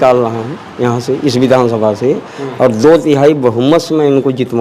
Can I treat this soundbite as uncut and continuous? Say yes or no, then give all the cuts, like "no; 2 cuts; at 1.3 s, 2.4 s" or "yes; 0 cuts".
yes; 0 cuts